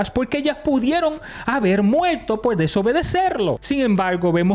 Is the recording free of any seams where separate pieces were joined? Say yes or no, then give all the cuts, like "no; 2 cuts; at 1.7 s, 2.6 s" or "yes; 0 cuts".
no; 1 cut; at 3.6 s